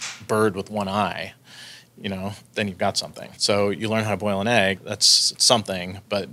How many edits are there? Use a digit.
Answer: 3